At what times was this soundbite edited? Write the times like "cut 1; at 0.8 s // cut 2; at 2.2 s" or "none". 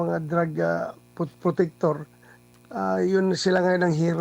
none